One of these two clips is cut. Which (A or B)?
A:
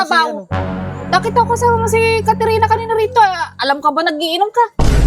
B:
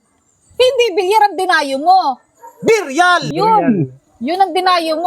B